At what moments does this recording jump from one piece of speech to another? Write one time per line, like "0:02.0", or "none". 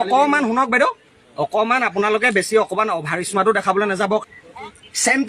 0:04.2

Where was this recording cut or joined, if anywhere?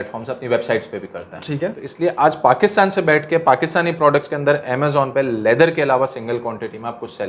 0:01.8

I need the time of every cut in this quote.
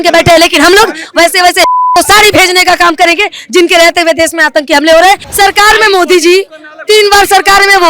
0:05.3

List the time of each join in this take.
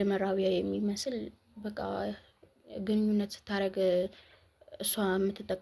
none

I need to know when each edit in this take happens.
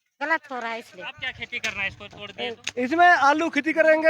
0:01.4

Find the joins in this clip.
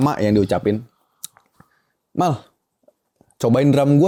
none

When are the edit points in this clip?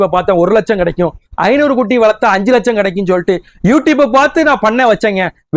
none

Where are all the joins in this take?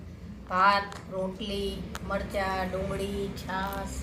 none

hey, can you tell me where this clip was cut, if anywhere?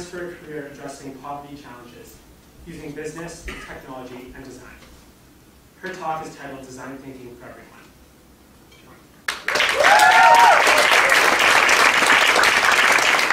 0:09.6

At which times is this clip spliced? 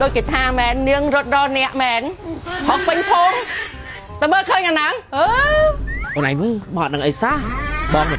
0:05.9

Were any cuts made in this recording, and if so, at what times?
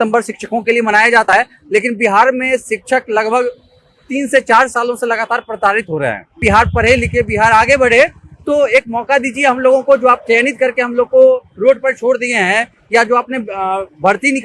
0:01.3
0:06.4

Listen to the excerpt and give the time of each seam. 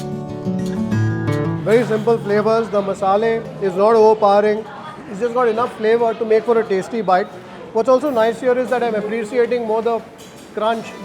none

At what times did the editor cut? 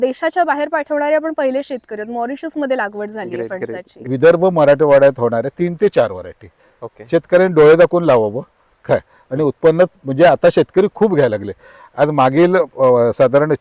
0:04.0

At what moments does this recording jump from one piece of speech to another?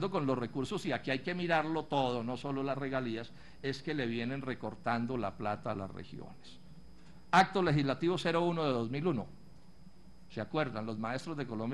none

